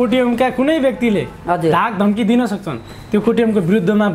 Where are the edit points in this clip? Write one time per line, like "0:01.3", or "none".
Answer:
none